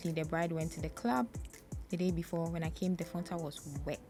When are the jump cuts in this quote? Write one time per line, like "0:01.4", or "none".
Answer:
none